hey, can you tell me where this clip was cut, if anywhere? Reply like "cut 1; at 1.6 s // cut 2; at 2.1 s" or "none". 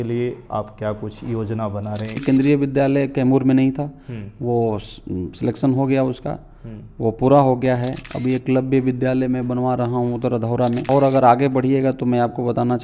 cut 1; at 2.2 s // cut 2; at 10.9 s